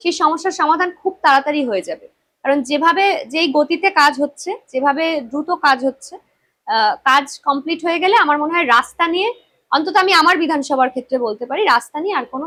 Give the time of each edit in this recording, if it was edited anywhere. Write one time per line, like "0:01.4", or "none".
none

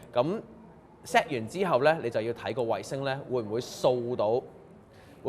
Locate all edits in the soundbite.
none

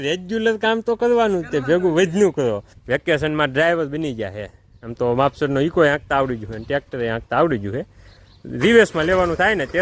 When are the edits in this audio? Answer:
0:02.7

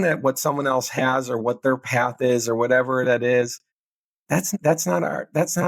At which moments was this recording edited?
0:04.5

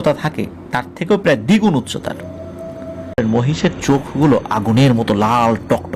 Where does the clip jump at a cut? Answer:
0:03.2

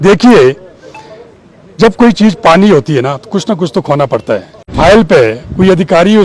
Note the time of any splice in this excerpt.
0:04.7

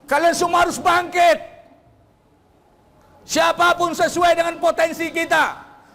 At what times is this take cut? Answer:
none

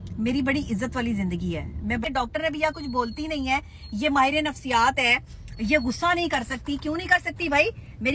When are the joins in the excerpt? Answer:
0:02.0

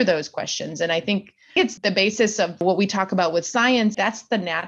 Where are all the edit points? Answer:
0:01.5
0:02.6
0:04.0

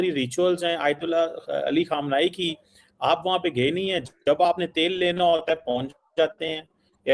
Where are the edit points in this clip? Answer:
none

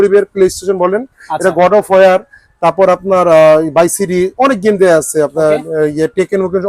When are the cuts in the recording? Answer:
none

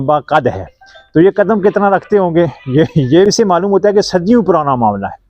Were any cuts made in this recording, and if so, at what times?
0:03.3

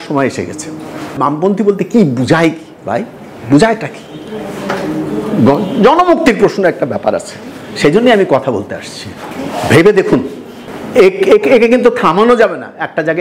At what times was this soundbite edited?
0:01.2

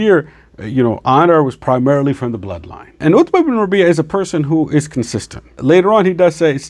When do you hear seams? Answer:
0:03.0
0:05.5

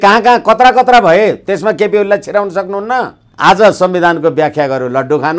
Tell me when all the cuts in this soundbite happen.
0:03.2

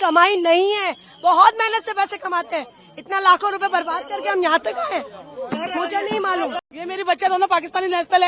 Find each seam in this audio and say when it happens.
none

